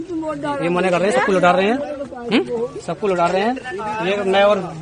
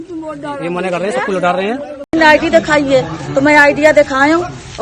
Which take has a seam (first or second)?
second